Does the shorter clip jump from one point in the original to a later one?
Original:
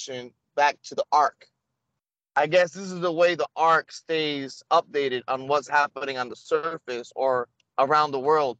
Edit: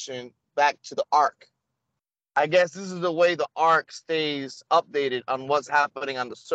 no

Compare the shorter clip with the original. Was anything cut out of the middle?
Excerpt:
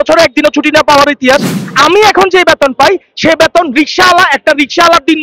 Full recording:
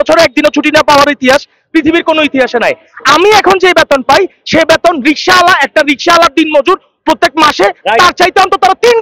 yes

